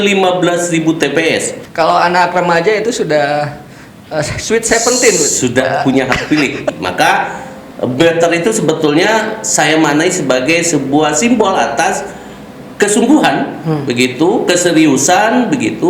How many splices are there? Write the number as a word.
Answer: two